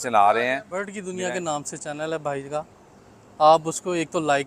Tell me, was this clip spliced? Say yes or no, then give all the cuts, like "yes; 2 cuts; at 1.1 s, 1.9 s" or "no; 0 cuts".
yes; 1 cut; at 1.0 s